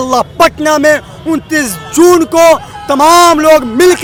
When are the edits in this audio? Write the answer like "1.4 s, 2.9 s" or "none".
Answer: none